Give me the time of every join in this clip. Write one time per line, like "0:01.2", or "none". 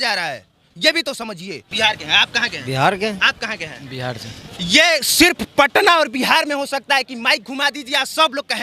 0:01.6